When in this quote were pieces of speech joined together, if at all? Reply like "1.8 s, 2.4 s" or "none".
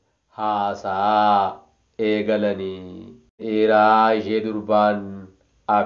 3.4 s